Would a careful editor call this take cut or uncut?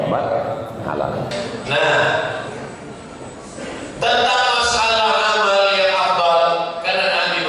cut